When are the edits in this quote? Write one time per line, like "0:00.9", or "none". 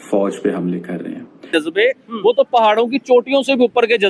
0:01.5